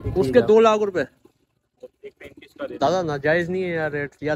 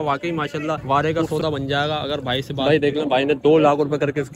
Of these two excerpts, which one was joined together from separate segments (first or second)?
second